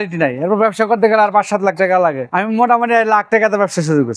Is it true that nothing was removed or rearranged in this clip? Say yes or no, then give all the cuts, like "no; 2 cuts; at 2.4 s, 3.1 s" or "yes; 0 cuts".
no; 1 cut; at 2.3 s